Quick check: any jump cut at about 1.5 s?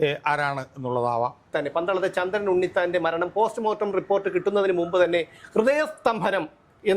yes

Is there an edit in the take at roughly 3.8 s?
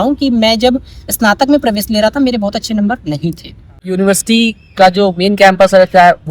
yes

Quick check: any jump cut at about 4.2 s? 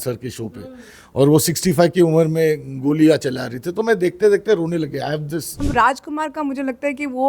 no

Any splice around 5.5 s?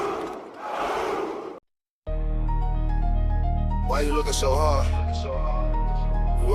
no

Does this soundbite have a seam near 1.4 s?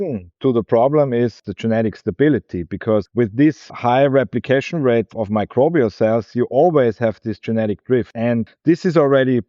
yes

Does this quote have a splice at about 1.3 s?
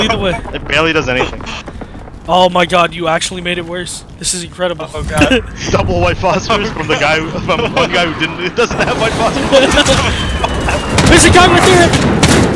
no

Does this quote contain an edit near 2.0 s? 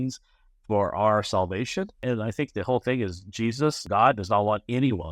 yes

